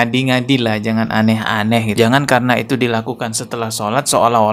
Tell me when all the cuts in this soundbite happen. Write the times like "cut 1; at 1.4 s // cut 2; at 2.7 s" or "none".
cut 1; at 1.9 s

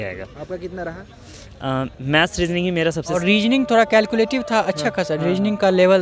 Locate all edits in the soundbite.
cut 1; at 3.1 s

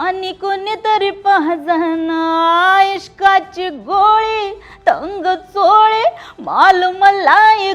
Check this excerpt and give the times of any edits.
none

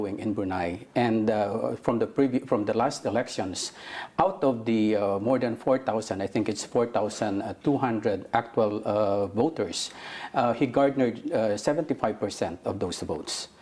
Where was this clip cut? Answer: none

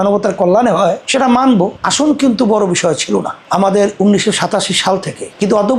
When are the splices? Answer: cut 1; at 1.8 s // cut 2; at 3.4 s

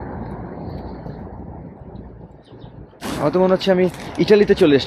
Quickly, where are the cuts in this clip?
cut 1; at 2.9 s

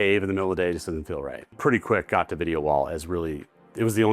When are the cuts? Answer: cut 1; at 1.5 s

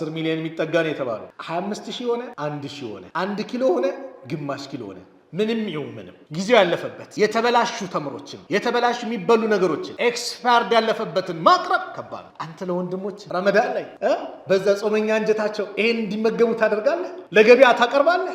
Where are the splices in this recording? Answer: cut 1; at 1.3 s

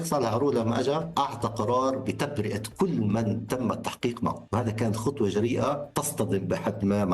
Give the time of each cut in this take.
cut 1; at 1.1 s // cut 2; at 4.4 s // cut 3; at 5.9 s

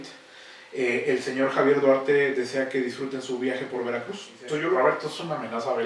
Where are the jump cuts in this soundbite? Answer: cut 1; at 4.6 s

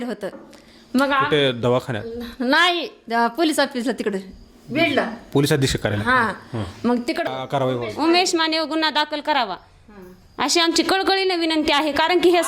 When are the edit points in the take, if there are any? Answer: cut 1; at 7.3 s

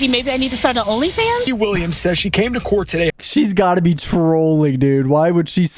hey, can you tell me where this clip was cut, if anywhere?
cut 1; at 1.5 s // cut 2; at 3.2 s

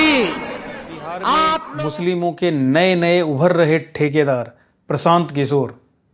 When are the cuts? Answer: cut 1; at 1.7 s

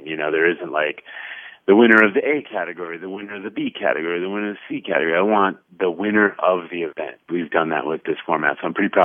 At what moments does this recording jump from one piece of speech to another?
cut 1; at 7.2 s // cut 2; at 8.0 s

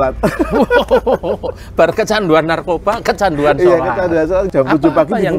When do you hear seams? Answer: cut 1; at 4.5 s

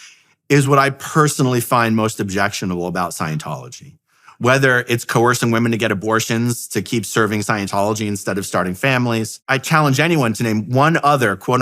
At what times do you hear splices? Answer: cut 1; at 9.4 s

